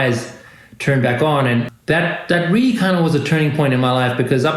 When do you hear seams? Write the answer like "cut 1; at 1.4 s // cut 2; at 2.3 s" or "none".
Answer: cut 1; at 1.7 s